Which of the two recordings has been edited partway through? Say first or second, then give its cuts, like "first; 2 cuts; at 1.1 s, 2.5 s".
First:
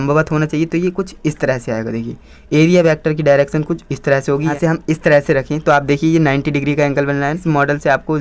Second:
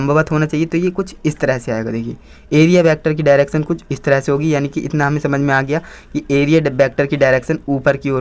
first; 2 cuts; at 4.5 s, 7.4 s